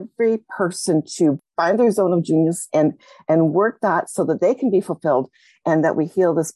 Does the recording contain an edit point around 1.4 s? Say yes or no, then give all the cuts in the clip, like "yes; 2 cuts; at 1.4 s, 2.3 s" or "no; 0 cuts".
yes; 1 cut; at 1.4 s